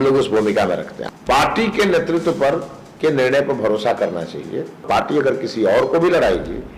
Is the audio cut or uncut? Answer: cut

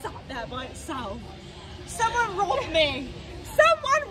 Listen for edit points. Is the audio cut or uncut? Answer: uncut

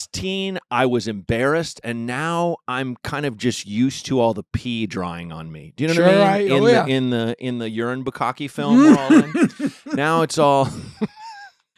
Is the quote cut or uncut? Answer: uncut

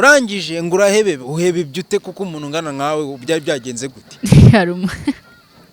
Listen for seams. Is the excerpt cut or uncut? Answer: uncut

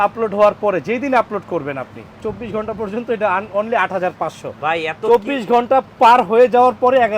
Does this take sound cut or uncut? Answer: cut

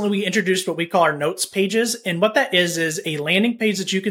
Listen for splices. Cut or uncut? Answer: uncut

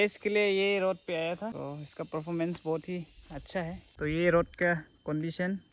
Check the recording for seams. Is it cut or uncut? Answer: cut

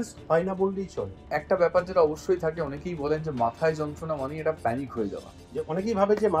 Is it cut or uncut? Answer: cut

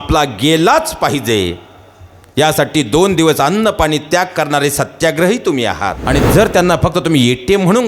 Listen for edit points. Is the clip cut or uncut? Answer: cut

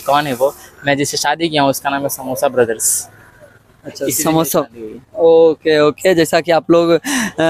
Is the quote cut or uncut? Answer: uncut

